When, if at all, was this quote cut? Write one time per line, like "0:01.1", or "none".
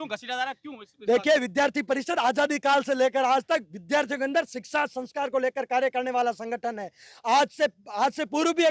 none